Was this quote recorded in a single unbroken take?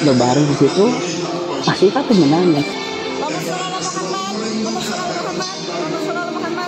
no; 1 cut; at 2.7 s

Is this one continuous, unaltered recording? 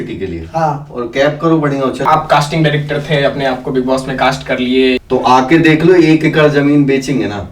no; 2 cuts; at 2.0 s, 5.0 s

